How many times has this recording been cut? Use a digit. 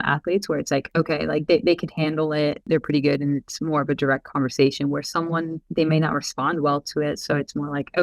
3